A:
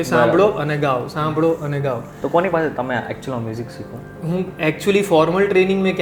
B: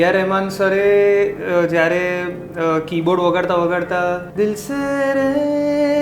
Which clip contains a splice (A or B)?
B